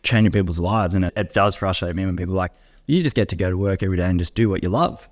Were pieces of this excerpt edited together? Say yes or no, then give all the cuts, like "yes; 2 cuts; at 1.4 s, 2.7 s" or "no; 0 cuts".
yes; 1 cut; at 1.1 s